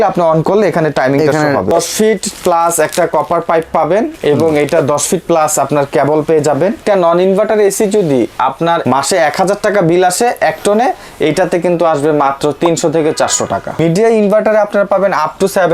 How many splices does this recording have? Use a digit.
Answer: 3